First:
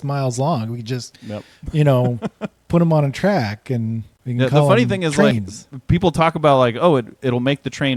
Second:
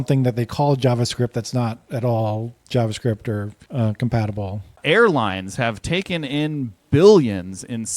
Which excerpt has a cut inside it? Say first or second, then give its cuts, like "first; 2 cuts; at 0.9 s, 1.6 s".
second; 1 cut; at 4.8 s